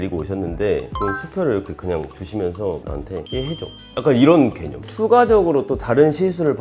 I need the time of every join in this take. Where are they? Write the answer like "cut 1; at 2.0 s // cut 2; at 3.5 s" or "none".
cut 1; at 0.9 s

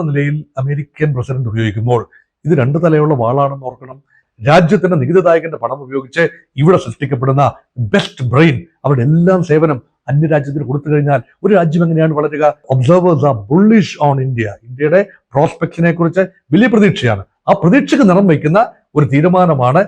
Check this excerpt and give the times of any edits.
cut 1; at 4.3 s // cut 2; at 12.7 s

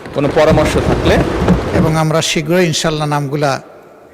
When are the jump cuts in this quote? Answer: cut 1; at 1.8 s

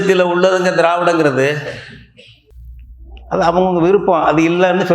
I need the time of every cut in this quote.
cut 1; at 2.4 s

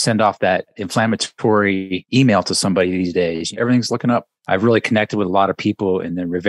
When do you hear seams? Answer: cut 1; at 0.8 s // cut 2; at 2.0 s // cut 3; at 3.5 s // cut 4; at 4.3 s

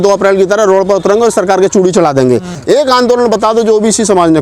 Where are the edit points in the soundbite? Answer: cut 1; at 2.5 s

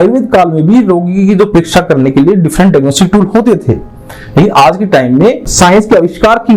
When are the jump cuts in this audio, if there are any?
cut 1; at 5.5 s

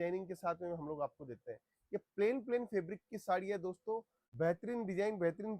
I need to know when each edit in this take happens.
cut 1; at 4.2 s

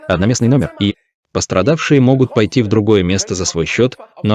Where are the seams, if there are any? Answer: cut 1; at 0.9 s

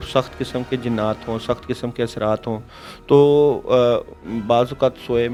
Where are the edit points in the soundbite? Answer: none

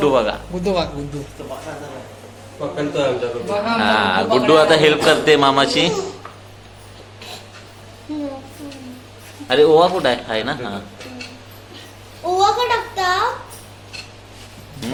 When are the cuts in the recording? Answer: none

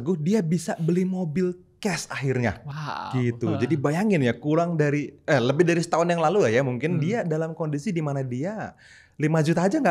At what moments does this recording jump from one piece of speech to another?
none

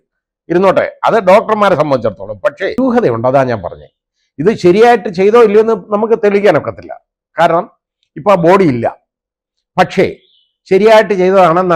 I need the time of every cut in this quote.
cut 1; at 2.8 s

